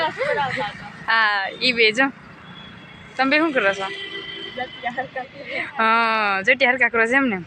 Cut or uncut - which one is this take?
uncut